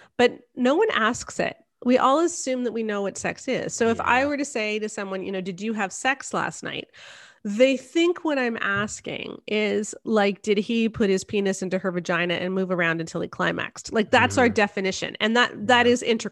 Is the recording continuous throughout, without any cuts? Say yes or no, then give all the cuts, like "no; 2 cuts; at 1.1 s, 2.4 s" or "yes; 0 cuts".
yes; 0 cuts